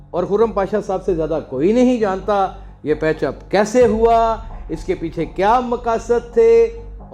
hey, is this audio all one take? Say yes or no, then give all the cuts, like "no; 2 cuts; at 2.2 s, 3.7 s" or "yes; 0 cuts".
yes; 0 cuts